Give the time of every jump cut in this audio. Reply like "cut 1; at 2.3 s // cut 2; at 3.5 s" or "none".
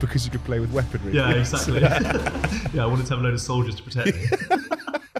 none